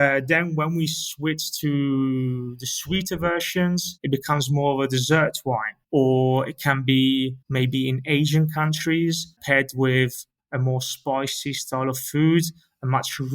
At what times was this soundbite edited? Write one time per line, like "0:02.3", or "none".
0:03.9
0:05.7
0:07.4